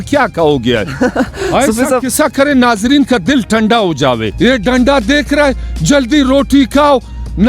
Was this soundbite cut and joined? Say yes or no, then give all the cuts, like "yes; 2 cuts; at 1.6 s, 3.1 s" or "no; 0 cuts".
yes; 1 cut; at 4.3 s